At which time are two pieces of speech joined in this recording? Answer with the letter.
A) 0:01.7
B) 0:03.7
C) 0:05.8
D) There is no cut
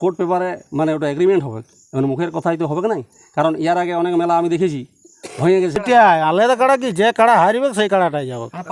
C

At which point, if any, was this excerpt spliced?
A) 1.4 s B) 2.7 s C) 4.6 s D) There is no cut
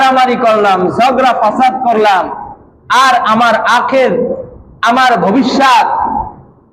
D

